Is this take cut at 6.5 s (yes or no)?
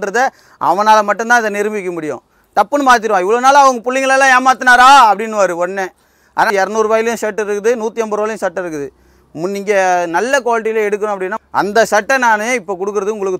yes